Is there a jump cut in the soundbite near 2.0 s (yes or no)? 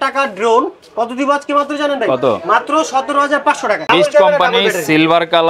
no